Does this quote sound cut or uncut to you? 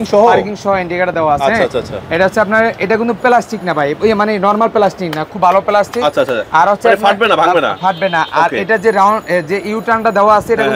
uncut